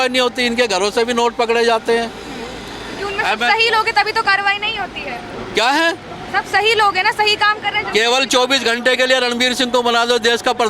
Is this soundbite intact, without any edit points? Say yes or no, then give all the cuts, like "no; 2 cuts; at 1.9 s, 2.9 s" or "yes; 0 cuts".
yes; 0 cuts